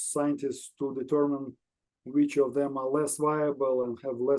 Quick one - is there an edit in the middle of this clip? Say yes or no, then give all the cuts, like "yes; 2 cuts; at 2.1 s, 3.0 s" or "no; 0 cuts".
no; 0 cuts